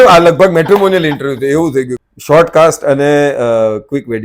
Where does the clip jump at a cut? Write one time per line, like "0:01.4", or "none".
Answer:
0:02.0